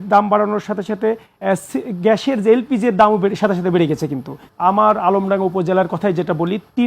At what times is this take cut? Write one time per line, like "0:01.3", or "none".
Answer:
0:04.4